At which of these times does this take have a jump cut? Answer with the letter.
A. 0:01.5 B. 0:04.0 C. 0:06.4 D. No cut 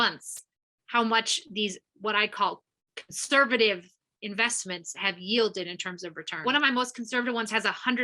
C